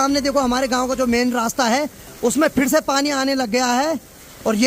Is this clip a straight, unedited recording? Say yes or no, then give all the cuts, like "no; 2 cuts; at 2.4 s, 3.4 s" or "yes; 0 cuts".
yes; 0 cuts